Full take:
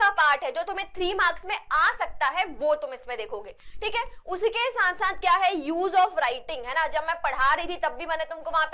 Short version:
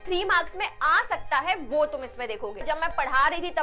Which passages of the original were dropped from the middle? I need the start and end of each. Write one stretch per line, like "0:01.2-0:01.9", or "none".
0:03.5-0:06.9

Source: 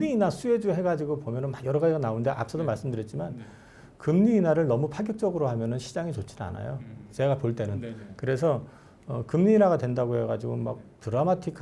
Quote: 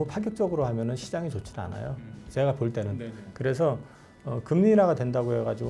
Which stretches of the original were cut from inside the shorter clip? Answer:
none

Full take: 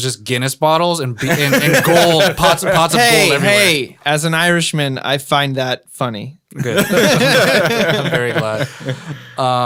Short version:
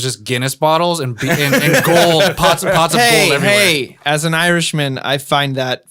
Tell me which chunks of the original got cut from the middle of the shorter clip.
none

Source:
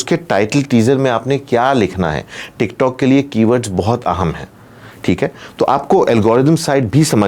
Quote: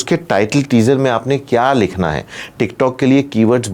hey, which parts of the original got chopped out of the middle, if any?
none

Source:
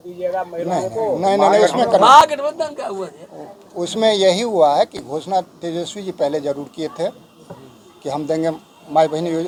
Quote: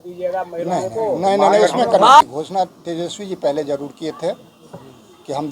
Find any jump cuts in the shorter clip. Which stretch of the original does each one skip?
0:02.2-0:05.0

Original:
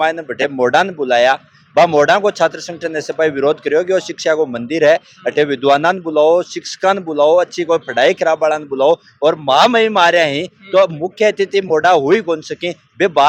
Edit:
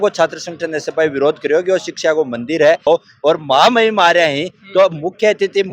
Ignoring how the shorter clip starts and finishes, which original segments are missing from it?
0:05.1-0:08.8

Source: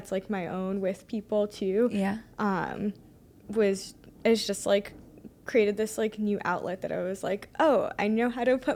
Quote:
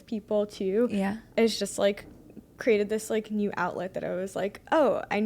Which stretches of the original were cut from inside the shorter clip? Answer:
0:02.2-0:04.1

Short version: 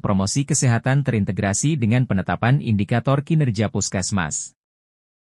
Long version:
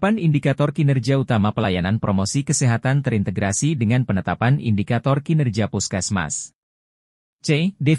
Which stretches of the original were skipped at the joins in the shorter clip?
none

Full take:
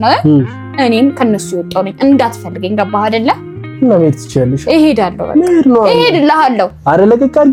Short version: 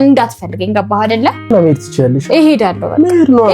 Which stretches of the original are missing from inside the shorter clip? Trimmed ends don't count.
0:03.5-0:03.9

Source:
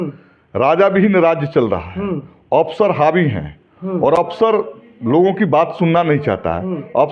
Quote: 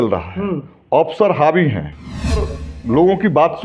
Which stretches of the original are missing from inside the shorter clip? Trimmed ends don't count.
0:04.0-0:04.5

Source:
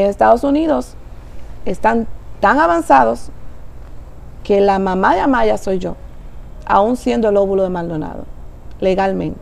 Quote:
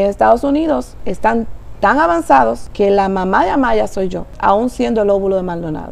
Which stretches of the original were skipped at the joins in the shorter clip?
0:01.0-0:01.6
0:03.3-0:04.4
0:06.0-0:06.5

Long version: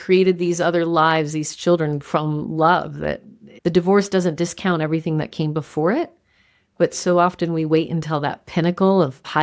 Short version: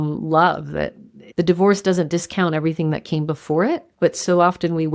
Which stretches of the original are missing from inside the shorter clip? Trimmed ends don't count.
0:06.2-0:06.7

